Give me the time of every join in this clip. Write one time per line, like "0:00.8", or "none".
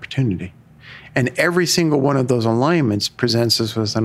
0:03.1